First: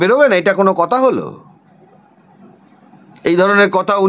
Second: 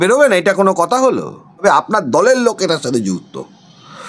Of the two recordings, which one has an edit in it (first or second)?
second